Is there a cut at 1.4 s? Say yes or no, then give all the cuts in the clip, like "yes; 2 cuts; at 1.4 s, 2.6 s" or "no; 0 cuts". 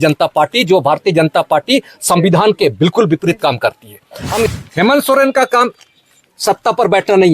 no; 1 cut; at 4.5 s